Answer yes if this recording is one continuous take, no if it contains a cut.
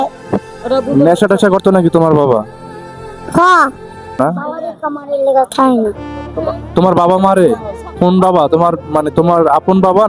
no